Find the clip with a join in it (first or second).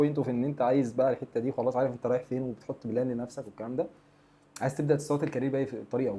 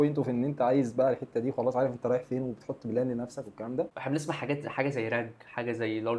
second